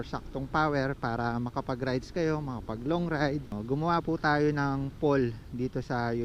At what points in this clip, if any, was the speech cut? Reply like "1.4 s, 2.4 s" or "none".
3.6 s